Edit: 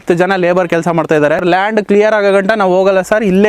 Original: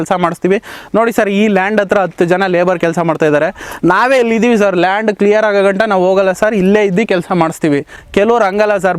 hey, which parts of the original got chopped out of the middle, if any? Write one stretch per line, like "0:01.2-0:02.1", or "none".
0:03.5-0:04.7